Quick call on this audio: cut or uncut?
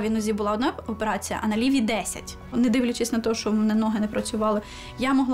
cut